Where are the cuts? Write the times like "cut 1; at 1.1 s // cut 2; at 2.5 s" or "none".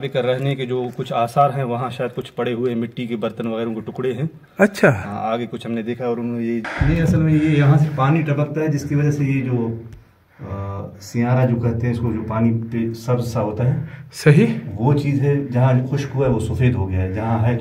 cut 1; at 6.7 s